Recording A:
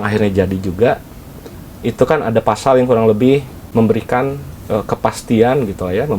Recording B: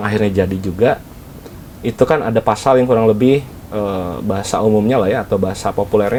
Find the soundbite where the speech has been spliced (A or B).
A